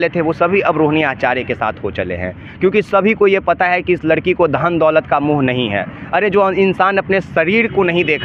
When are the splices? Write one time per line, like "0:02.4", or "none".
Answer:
none